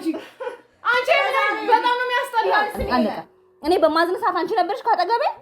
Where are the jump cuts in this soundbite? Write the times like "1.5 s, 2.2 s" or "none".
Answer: 2.8 s